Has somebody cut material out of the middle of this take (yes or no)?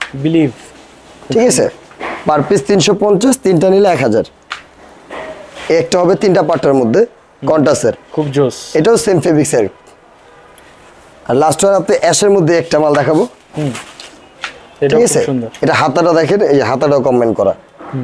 no